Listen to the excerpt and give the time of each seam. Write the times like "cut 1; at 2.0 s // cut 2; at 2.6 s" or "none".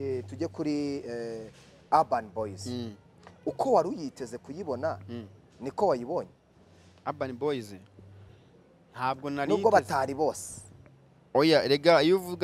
none